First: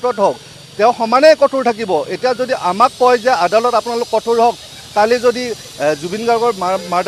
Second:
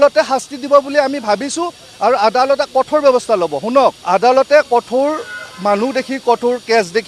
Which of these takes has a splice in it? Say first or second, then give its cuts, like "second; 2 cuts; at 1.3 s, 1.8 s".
second; 1 cut; at 4.0 s